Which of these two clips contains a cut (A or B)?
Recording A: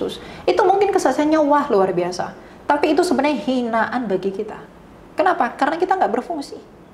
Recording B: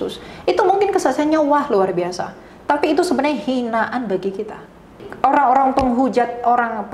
B